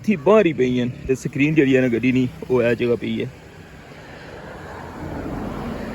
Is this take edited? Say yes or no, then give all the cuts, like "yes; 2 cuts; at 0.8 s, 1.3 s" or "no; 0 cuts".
yes; 1 cut; at 1.2 s